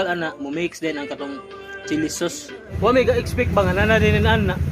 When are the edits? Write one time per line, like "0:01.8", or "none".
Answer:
0:02.7